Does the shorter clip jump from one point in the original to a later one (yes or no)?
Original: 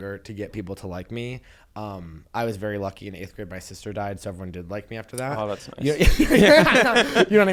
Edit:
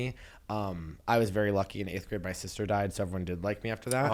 no